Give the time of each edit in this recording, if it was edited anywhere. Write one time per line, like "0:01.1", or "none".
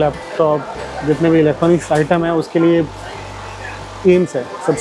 none